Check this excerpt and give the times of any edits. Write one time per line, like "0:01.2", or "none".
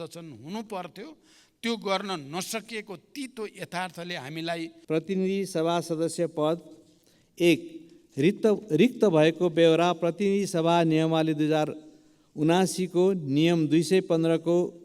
0:04.7